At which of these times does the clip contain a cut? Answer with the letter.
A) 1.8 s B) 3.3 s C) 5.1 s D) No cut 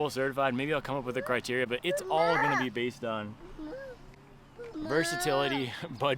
A